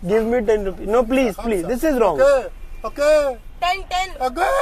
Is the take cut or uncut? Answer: uncut